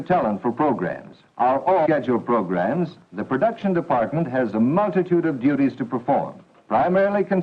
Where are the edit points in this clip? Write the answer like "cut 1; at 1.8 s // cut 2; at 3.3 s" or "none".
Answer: none